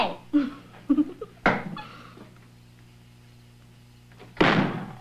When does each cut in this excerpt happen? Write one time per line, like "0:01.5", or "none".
0:01.2